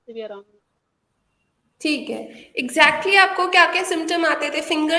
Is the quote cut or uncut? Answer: uncut